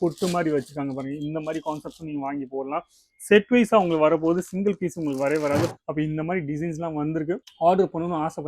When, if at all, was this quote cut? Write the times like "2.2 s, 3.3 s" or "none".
5.7 s